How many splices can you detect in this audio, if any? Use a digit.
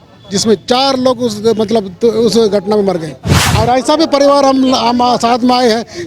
1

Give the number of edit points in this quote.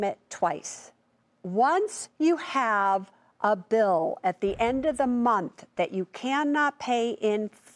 1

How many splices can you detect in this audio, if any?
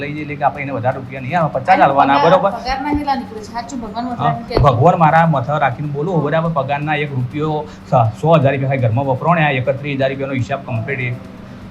0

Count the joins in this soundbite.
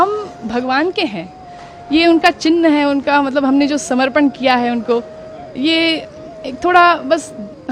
0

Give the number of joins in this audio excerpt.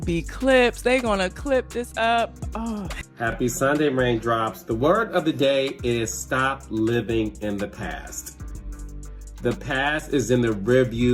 1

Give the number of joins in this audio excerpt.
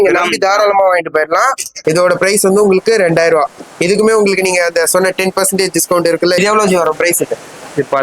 2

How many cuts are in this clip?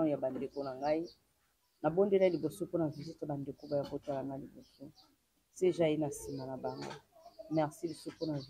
0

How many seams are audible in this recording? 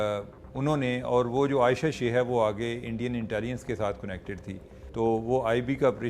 1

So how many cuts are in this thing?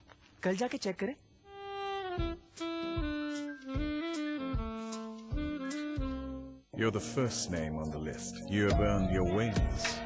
1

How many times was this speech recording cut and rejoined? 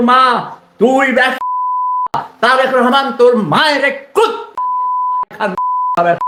0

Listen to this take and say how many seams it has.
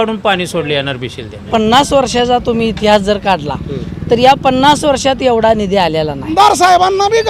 2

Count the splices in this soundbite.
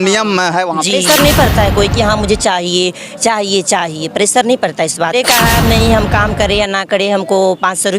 2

